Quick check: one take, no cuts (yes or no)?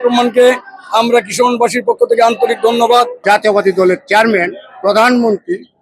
no